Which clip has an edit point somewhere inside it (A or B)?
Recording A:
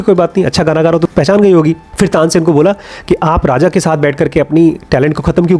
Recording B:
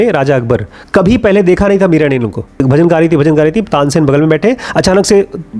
B